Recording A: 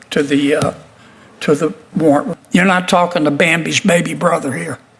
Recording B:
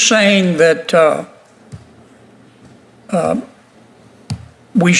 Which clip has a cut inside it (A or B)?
A